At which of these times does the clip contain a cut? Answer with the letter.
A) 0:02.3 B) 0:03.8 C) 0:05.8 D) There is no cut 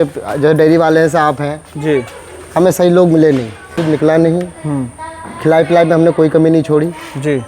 B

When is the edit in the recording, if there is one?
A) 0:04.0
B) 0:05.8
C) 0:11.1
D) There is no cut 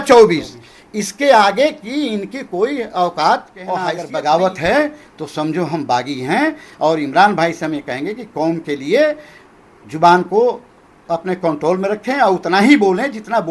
A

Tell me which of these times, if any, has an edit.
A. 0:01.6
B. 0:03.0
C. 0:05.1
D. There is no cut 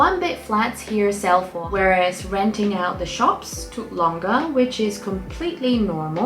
A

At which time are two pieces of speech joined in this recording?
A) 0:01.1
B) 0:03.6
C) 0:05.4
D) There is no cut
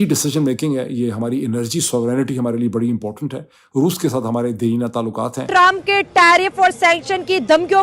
C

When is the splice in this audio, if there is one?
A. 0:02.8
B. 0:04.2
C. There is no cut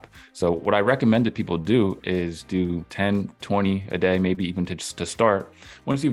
A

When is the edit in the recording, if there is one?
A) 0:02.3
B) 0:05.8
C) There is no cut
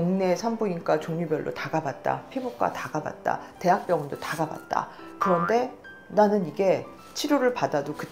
C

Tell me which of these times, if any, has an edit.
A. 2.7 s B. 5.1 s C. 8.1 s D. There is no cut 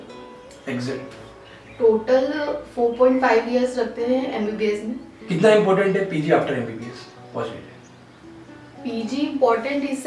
B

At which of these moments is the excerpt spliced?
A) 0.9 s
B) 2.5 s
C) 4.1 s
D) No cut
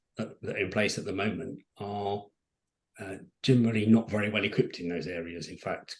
D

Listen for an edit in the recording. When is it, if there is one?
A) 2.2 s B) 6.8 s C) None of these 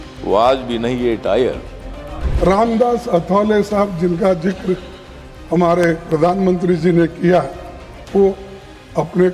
A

